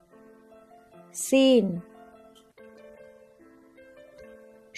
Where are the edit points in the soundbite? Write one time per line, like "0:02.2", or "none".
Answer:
0:01.0